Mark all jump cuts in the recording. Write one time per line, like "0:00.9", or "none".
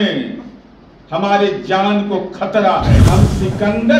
0:03.0